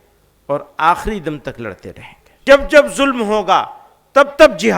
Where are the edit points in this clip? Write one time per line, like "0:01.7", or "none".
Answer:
0:02.4